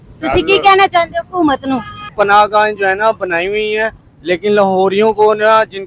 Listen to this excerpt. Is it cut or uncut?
cut